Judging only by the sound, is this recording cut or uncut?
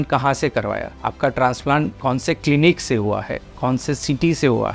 uncut